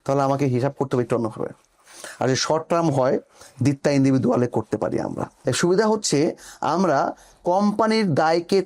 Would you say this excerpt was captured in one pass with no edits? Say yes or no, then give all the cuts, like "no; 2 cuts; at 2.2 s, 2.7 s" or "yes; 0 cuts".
no; 1 cut; at 5.3 s